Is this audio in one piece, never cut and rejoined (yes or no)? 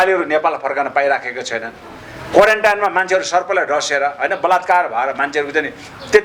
yes